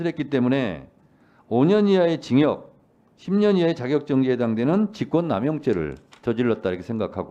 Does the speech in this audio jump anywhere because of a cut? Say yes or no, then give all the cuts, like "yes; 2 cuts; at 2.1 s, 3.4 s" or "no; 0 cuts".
no; 0 cuts